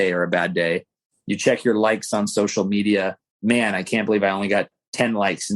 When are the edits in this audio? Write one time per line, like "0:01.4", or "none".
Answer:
0:03.3